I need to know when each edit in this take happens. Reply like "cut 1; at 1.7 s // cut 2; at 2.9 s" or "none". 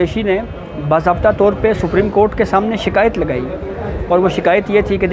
none